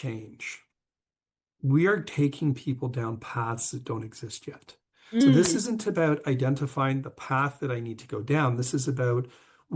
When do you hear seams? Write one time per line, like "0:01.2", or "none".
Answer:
none